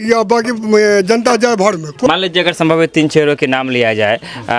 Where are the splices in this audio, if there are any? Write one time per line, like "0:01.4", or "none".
0:01.9